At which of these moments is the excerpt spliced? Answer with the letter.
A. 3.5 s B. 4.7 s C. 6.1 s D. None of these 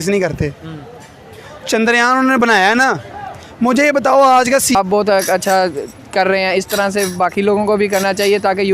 B